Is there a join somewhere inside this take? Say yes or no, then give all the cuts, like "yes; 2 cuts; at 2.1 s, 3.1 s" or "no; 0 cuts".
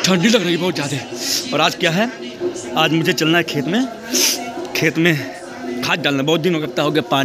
no; 0 cuts